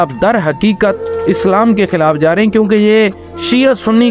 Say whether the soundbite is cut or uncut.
uncut